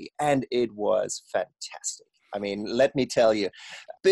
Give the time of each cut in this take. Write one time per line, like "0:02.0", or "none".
none